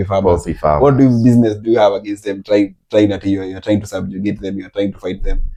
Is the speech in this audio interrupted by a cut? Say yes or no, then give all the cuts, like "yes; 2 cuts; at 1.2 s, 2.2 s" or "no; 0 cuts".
no; 0 cuts